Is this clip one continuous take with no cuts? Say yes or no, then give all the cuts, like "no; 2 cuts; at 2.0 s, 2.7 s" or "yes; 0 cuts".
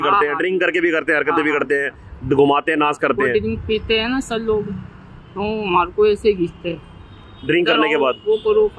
yes; 0 cuts